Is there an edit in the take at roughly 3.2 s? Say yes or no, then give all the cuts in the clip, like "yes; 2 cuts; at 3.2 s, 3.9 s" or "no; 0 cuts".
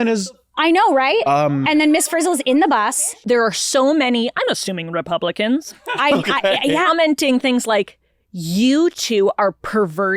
yes; 2 cuts; at 3.2 s, 6.9 s